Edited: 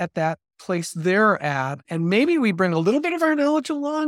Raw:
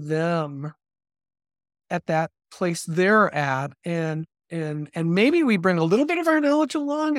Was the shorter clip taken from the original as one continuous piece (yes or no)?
no